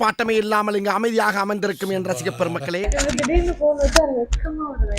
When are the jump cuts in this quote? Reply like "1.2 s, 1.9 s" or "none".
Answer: 2.8 s